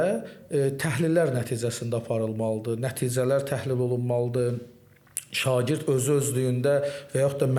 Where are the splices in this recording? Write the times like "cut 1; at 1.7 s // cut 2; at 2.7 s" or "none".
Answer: none